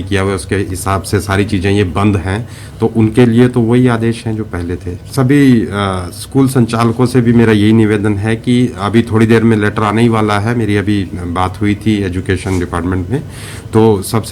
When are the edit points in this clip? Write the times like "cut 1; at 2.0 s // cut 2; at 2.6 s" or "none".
cut 1; at 5.0 s